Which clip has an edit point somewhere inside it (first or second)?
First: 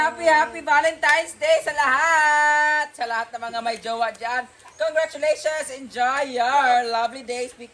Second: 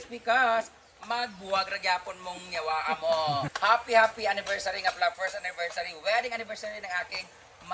second